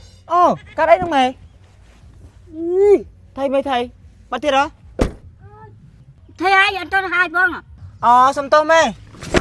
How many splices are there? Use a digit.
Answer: 1